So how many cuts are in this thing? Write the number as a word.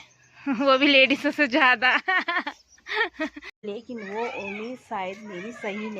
one